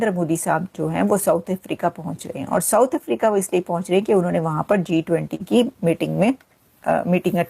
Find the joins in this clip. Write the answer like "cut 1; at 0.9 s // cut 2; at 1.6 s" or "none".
none